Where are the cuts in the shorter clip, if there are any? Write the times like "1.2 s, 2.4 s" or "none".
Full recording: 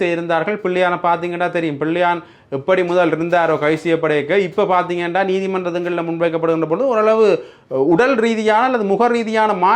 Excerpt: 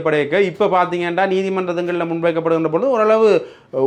none

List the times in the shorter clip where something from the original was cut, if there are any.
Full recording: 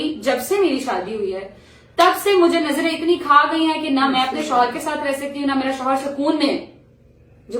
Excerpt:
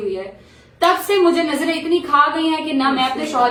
none

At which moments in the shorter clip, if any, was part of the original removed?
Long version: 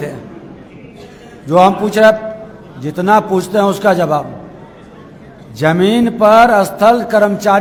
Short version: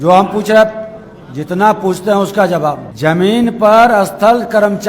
2.9 s

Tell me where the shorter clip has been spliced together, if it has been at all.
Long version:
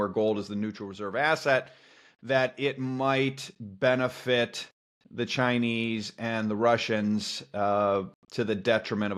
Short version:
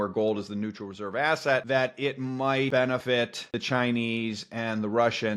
1.6 s, 3.0 s

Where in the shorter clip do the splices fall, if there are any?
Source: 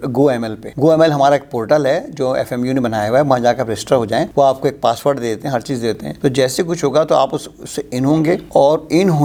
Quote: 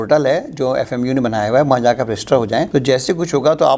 2.7 s

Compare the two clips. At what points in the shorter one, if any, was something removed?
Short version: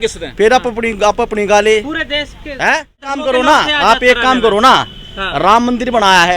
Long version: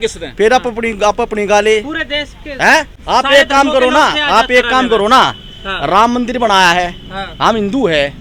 3.1 s

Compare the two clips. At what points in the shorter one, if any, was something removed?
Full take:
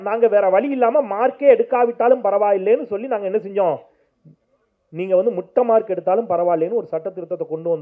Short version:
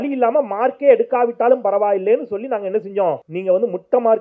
3.3 s

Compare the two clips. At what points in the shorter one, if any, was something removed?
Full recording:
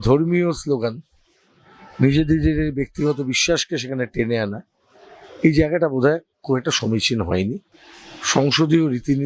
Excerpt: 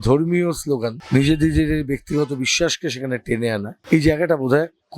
1.0 s, 3.7 s

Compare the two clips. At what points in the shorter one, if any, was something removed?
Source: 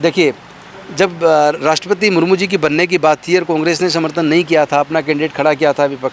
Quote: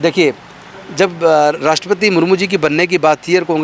none

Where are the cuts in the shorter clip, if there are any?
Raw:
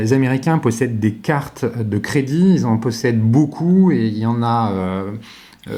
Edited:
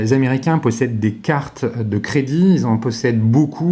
none

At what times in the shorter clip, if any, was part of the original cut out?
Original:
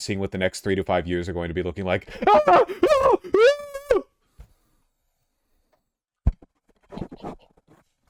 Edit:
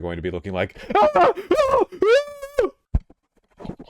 2.8 s

